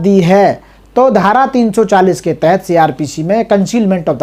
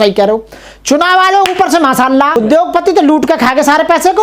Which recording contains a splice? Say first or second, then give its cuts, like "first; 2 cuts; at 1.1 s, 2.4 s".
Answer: second; 1 cut; at 2.4 s